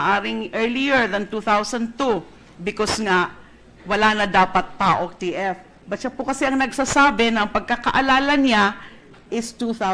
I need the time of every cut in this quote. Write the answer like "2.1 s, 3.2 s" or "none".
2.4 s